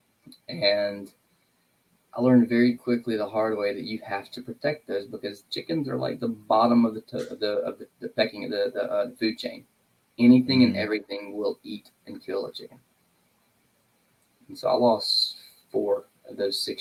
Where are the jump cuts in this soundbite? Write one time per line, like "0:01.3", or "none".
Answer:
none